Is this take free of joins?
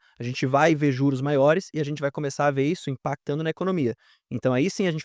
yes; 0 cuts

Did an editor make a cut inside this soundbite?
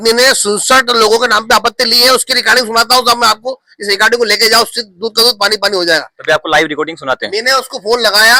no; 0 cuts

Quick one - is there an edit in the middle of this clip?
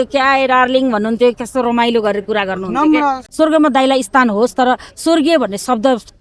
yes; 1 cut; at 3.2 s

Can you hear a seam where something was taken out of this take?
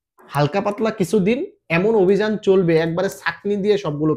no; 0 cuts

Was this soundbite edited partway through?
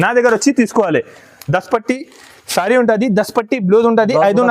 no; 0 cuts

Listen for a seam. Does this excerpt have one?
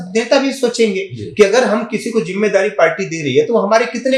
no; 0 cuts

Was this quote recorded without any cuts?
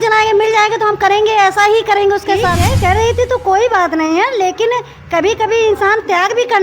no; 1 cut; at 2.7 s

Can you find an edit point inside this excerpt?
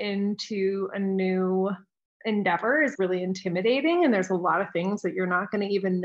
no; 0 cuts

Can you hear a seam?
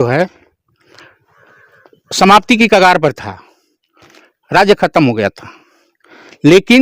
no; 0 cuts

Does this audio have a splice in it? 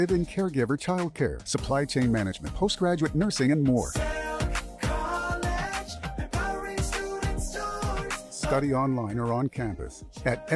no; 0 cuts

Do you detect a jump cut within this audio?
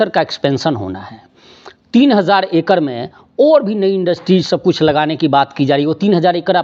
no; 0 cuts

